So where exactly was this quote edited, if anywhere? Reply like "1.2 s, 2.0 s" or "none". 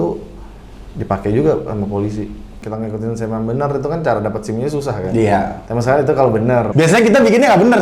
2.6 s, 6.7 s